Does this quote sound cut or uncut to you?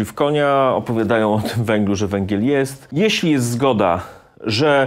cut